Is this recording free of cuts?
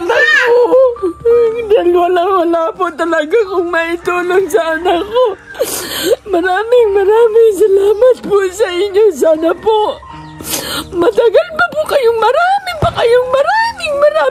yes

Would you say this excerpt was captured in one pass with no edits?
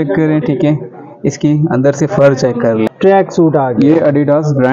no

